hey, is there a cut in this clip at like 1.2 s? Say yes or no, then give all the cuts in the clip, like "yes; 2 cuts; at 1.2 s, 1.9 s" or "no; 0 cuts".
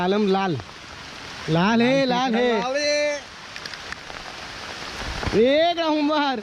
no; 1 cut; at 4.0 s